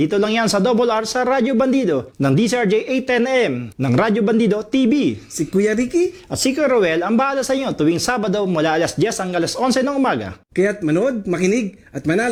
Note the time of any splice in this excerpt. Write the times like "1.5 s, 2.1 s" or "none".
none